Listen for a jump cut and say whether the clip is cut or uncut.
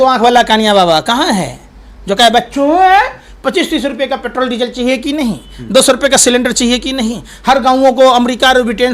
uncut